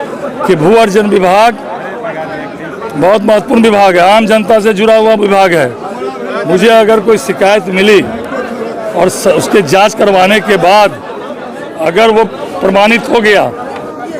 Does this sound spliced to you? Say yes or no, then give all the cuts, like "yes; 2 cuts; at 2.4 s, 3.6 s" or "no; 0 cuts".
no; 0 cuts